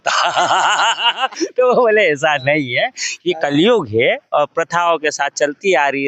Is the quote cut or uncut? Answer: uncut